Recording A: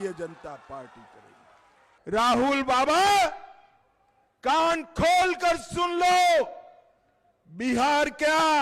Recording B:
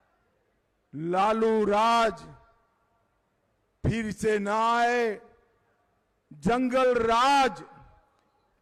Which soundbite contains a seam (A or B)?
A